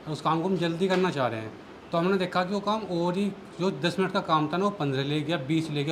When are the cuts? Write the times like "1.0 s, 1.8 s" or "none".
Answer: none